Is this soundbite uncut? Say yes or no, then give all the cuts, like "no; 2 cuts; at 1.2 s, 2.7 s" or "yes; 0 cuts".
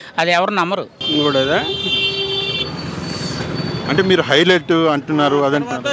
no; 1 cut; at 0.9 s